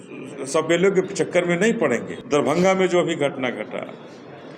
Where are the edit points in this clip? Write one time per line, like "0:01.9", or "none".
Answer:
0:02.1